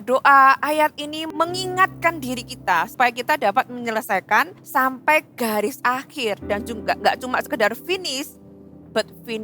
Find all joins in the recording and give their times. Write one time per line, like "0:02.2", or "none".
0:01.2
0:02.9
0:04.6

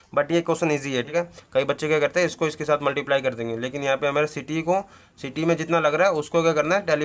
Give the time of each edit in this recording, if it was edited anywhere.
0:00.9

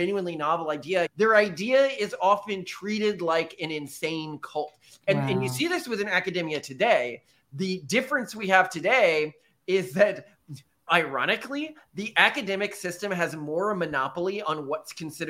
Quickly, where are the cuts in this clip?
0:01.1

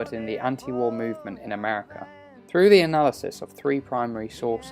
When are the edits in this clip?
none

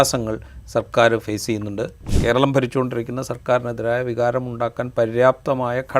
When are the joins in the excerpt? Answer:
0:02.0

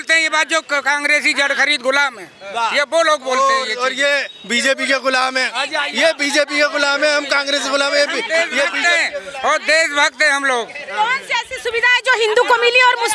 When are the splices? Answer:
none

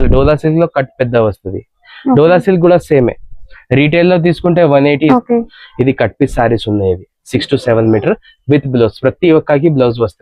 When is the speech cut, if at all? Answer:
0:05.1

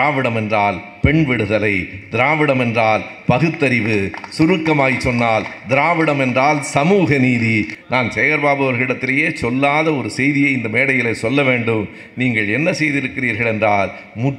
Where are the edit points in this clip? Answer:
0:07.7

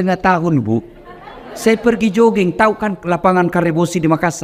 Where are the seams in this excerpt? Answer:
none

